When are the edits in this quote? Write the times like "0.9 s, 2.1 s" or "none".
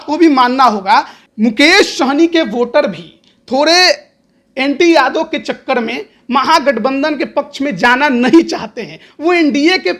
1.2 s